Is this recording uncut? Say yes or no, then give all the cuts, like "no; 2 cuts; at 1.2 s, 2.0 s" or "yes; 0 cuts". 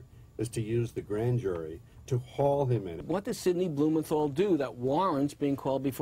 no; 1 cut; at 3.0 s